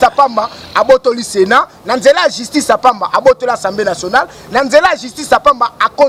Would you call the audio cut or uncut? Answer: uncut